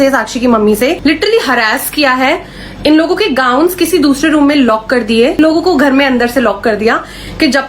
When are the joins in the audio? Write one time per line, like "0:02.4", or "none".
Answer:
0:01.0
0:05.4